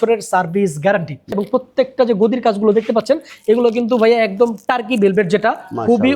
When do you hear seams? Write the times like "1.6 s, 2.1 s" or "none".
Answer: 1.3 s